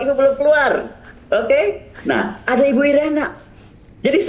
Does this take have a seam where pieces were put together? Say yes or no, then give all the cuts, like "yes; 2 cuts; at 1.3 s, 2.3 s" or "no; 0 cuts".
no; 0 cuts